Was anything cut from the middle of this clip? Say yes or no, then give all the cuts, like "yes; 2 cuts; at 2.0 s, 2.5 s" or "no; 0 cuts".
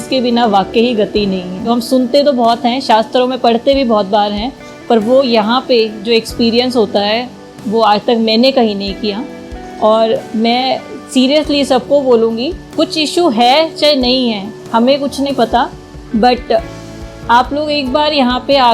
yes; 1 cut; at 1.7 s